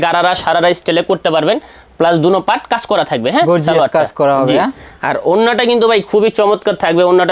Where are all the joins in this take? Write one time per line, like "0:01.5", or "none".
none